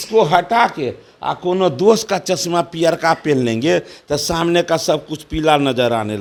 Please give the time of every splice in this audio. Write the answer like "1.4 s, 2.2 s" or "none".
none